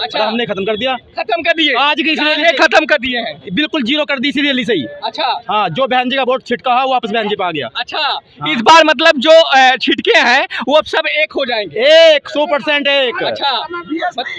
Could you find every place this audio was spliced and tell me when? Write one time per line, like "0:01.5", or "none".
none